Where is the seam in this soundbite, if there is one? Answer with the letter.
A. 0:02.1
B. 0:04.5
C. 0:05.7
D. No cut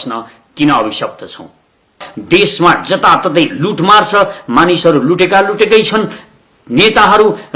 A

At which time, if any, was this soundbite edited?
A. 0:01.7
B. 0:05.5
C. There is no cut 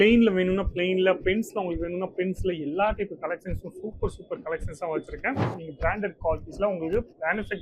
B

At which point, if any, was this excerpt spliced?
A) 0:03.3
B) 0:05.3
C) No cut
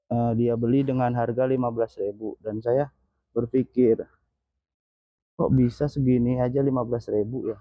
C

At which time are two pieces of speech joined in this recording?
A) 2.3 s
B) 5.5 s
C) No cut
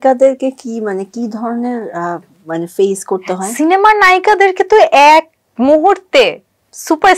C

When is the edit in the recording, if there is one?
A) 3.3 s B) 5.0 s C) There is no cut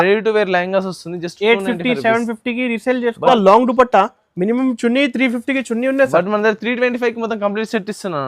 A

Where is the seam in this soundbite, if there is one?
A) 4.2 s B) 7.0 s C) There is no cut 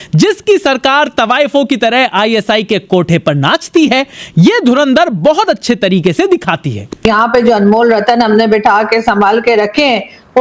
B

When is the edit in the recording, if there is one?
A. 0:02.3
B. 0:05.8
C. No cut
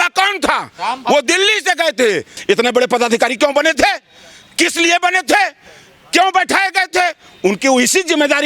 A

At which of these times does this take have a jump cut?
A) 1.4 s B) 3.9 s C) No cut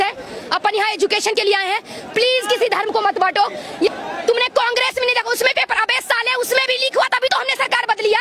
B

